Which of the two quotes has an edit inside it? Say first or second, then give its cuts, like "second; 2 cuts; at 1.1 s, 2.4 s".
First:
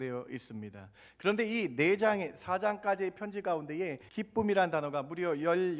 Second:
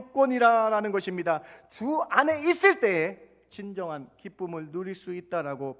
first; 1 cut; at 4.0 s